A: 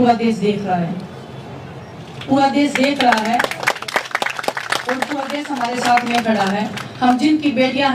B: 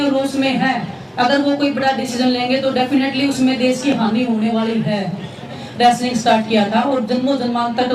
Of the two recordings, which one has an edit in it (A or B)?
B